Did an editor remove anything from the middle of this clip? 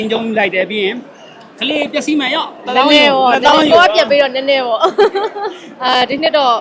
yes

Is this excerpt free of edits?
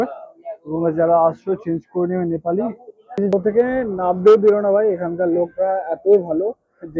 no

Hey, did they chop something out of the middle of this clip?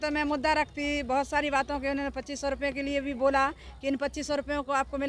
no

